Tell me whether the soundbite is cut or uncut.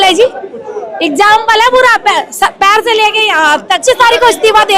cut